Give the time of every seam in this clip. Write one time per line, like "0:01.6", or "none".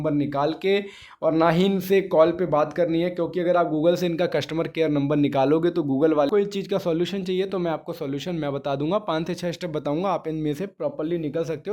0:06.3